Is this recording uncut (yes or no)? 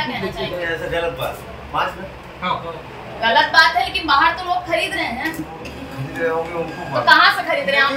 yes